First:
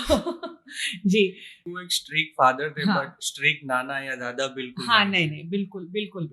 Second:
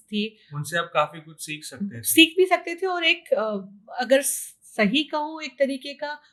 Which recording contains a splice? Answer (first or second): first